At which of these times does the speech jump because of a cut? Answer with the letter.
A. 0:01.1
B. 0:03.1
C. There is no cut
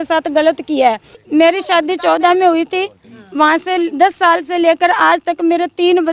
A